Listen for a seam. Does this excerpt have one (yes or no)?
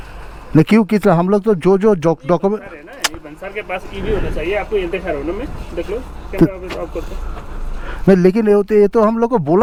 no